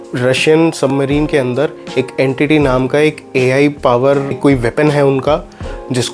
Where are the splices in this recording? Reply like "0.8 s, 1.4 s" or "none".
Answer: 4.4 s